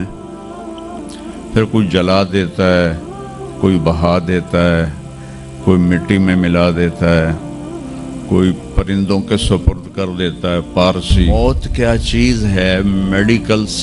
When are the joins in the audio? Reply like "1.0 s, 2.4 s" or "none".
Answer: 11.3 s